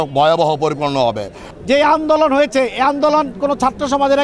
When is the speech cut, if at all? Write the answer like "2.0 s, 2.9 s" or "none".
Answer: 1.4 s